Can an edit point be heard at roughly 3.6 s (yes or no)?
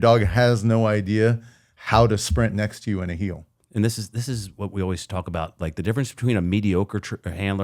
yes